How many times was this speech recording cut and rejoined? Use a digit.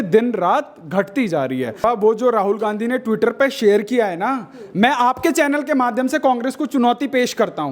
1